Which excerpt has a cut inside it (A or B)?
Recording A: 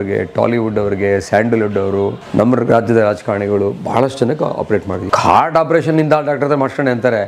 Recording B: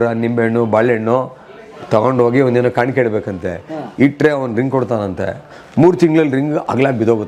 A